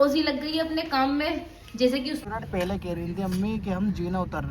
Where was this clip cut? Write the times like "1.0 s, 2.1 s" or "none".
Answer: 2.2 s